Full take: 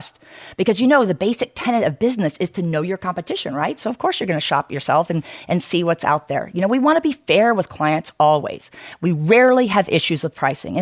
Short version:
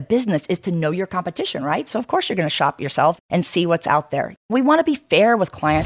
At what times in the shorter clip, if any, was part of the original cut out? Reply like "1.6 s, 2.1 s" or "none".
3.2 s